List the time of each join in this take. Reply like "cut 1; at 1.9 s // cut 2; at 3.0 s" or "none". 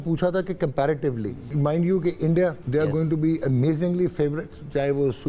cut 1; at 1.5 s // cut 2; at 2.6 s